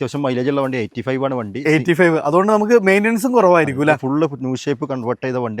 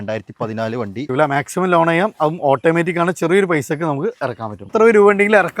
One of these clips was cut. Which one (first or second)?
second